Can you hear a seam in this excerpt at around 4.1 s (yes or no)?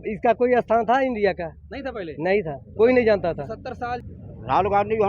yes